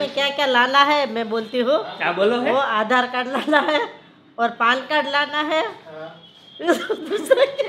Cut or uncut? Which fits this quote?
uncut